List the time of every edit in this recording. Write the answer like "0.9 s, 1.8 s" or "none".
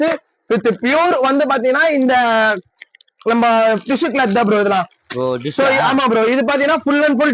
none